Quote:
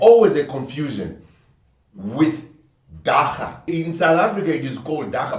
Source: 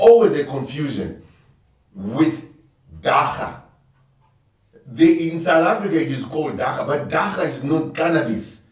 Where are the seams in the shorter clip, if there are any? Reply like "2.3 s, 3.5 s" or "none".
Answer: 3.7 s